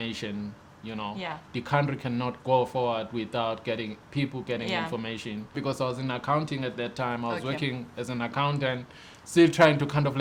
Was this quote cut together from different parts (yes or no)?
yes